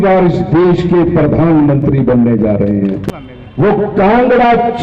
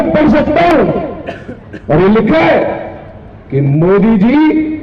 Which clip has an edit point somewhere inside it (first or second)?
first